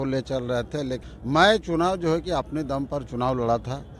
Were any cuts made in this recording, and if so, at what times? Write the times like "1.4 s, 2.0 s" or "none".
1.0 s